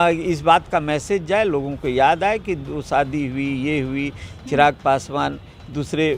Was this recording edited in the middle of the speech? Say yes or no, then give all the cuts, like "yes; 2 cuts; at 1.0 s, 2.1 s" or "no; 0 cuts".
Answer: no; 0 cuts